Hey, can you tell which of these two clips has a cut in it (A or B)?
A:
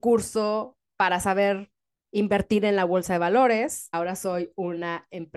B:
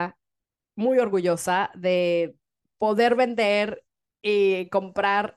A